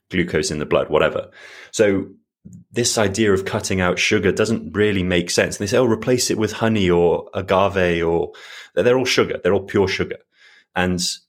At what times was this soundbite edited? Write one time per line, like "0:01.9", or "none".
none